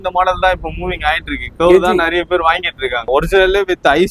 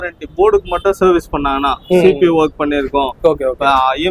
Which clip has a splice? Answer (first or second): first